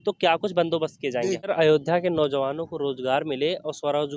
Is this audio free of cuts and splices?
no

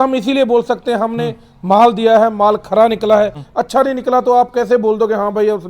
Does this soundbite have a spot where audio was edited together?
yes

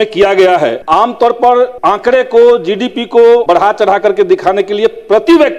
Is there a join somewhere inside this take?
yes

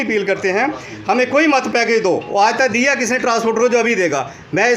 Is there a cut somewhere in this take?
no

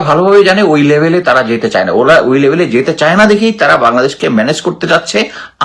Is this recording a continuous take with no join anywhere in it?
yes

